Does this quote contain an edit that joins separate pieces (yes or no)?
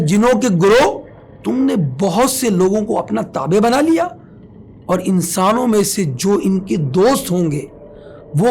no